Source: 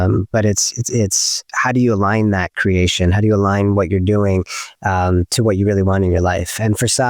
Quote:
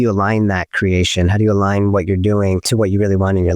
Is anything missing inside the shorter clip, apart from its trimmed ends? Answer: yes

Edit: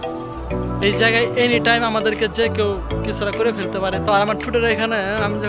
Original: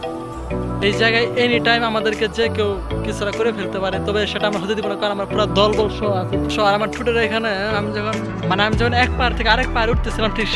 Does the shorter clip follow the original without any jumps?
no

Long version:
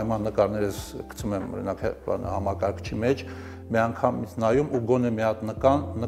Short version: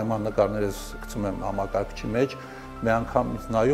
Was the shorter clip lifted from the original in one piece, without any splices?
no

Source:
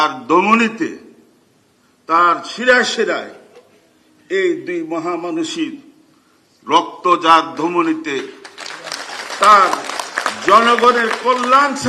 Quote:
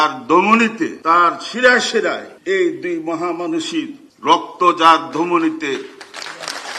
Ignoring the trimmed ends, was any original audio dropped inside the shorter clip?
yes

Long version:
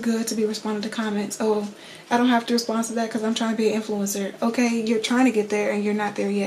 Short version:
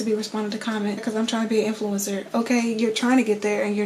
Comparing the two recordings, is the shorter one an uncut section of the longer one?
no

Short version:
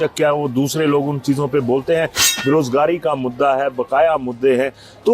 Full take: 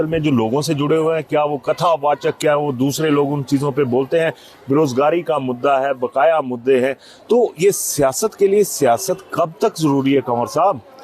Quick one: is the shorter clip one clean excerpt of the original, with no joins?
yes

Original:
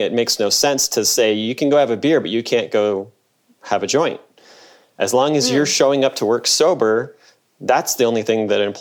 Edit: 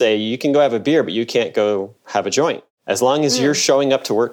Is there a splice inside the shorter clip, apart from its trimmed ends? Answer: yes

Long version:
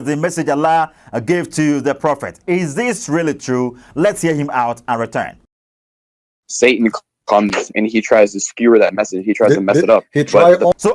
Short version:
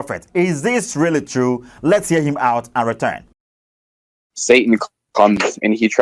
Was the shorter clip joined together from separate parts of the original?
no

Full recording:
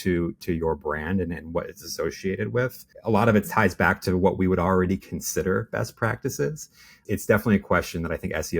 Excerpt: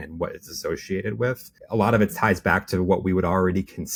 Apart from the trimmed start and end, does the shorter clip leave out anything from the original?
no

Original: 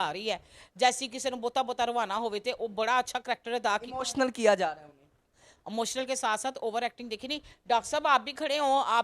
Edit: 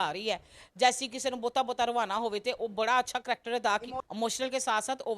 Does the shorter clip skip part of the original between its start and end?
yes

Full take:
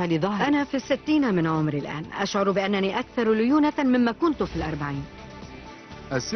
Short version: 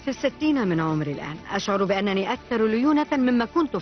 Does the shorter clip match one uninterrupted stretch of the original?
yes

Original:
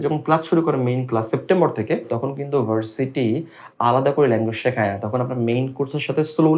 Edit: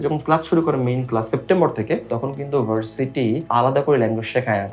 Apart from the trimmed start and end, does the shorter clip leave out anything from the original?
yes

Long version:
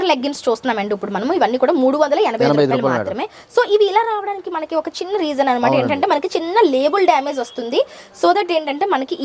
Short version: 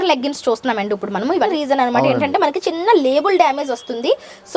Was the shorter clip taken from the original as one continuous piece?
no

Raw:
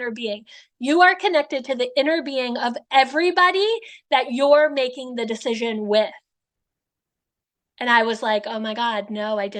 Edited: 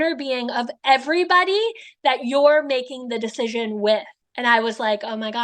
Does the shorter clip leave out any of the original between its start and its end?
yes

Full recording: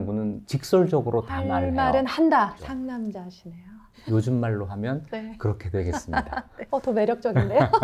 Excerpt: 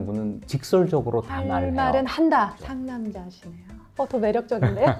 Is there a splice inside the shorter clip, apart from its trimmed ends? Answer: yes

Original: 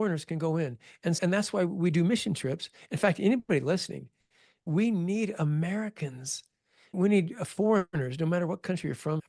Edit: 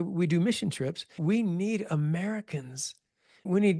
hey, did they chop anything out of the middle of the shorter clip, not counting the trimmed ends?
yes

